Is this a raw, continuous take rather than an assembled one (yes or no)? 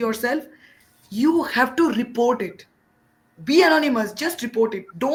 yes